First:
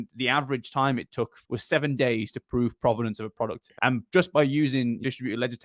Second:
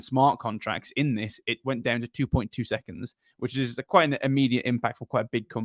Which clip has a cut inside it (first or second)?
first